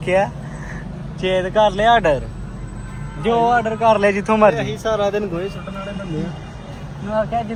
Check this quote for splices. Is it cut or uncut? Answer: uncut